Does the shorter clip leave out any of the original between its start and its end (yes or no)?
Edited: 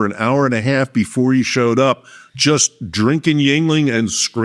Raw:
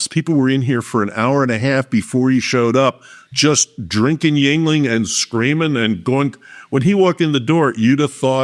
no